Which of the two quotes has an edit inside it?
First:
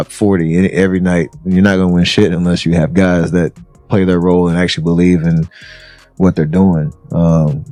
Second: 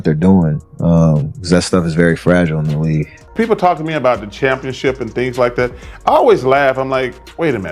second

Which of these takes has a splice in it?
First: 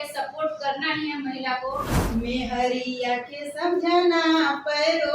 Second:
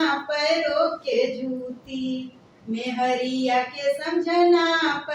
first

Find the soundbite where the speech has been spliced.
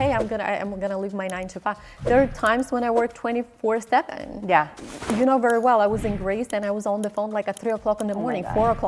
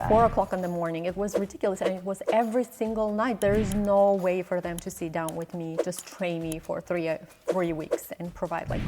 second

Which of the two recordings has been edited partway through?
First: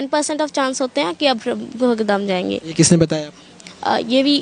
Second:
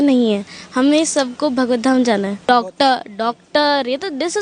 second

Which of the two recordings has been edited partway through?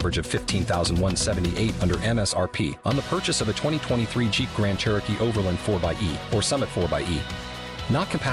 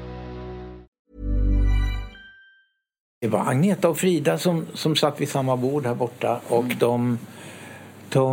second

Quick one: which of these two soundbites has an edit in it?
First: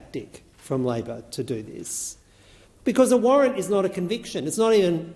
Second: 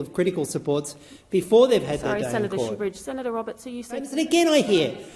second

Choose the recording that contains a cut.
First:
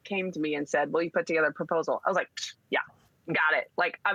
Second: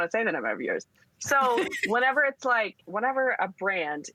second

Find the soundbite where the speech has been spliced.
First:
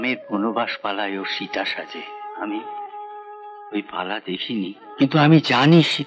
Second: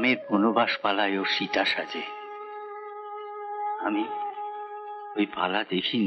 first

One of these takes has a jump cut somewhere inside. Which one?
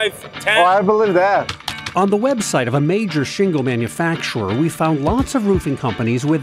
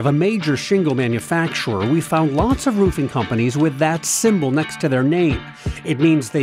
first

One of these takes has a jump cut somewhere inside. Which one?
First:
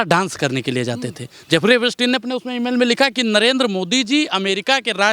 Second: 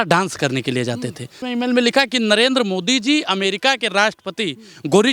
second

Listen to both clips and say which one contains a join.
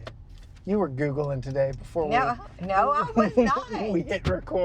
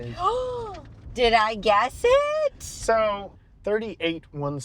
second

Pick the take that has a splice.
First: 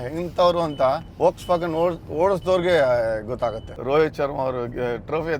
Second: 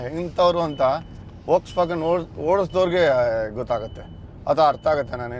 first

